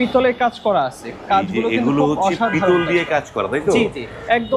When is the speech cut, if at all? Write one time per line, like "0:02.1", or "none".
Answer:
none